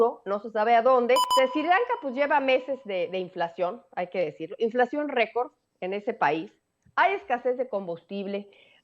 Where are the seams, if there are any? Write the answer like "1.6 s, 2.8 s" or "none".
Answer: 1.3 s